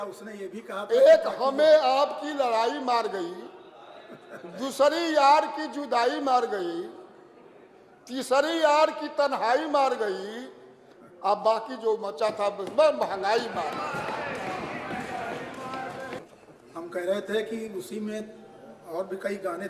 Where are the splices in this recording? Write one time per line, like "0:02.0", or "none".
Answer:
0:16.2

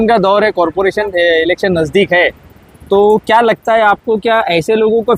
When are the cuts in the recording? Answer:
none

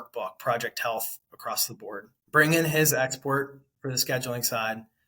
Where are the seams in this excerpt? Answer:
0:02.2

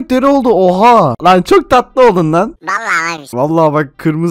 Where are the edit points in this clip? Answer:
0:01.2

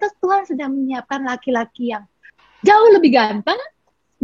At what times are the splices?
0:02.3

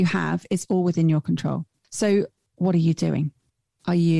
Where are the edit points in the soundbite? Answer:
0:01.8
0:02.4

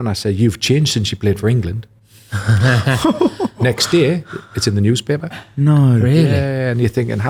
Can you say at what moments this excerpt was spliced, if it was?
none

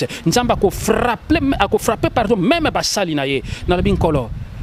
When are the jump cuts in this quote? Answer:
none

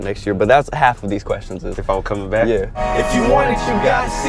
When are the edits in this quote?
0:02.8

